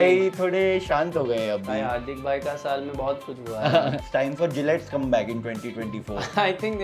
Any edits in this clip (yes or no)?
yes